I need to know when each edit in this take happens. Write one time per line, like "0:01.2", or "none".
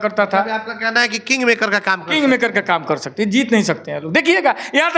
none